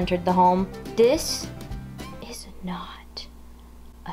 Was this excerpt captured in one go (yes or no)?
yes